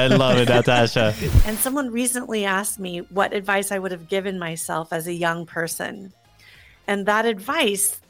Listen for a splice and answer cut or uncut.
cut